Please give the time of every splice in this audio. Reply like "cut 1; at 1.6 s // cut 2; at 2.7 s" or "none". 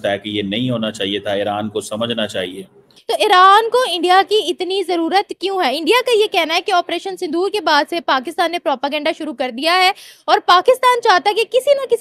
cut 1; at 2.9 s